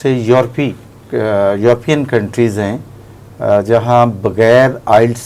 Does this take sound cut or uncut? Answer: uncut